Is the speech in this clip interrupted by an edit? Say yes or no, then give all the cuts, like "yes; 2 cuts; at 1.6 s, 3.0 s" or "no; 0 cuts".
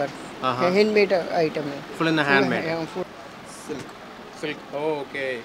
yes; 1 cut; at 3.0 s